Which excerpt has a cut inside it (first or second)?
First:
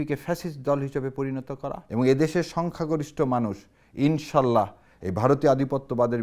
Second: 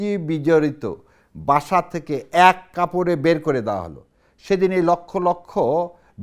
first